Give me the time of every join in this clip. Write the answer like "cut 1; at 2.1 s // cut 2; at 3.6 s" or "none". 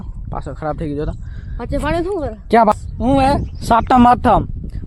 cut 1; at 2.7 s